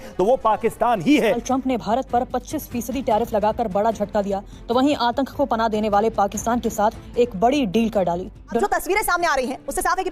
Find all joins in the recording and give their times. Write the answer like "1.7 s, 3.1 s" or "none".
1.4 s, 8.6 s